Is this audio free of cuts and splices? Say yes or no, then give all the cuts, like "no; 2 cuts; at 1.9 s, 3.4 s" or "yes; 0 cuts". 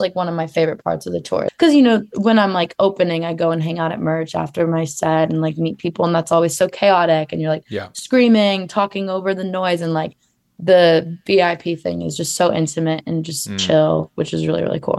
no; 1 cut; at 1.5 s